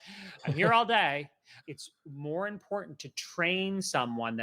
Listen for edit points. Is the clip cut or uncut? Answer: cut